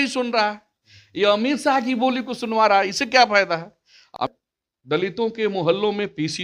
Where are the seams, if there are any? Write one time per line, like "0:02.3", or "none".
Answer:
0:04.1

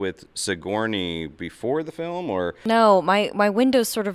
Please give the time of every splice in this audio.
0:02.6

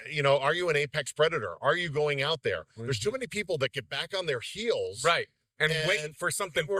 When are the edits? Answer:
none

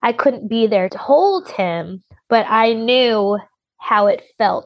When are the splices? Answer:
0:01.0

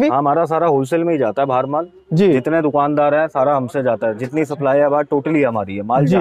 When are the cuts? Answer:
none

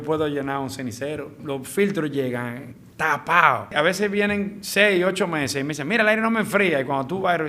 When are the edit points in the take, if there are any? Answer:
0:01.4
0:03.7

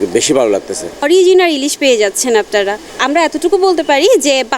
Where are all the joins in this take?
0:01.0

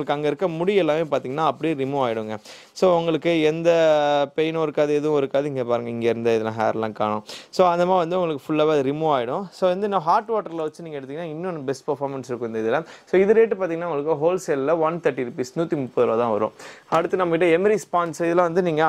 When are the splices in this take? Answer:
none

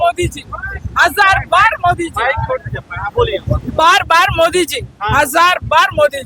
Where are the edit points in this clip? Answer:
none

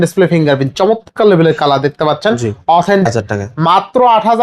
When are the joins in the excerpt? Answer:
0:03.1

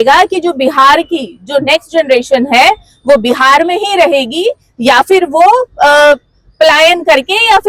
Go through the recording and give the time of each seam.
none

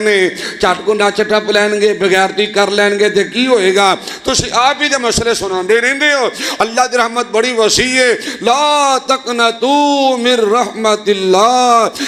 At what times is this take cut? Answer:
none

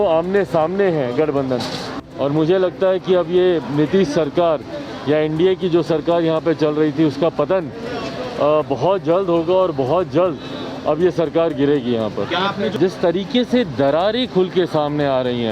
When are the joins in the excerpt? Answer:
0:02.0
0:12.7

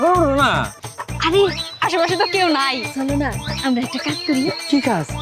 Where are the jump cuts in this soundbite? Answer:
none

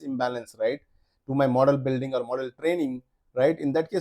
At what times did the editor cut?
none

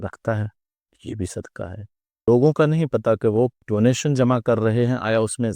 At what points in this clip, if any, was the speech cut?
0:02.2
0:03.6

